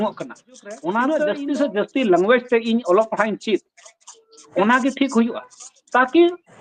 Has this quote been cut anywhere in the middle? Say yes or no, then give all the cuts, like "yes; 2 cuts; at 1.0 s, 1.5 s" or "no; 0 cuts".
yes; 2 cuts; at 1.3 s, 4.4 s